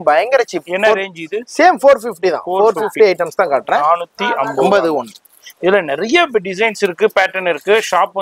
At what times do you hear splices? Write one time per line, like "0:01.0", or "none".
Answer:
none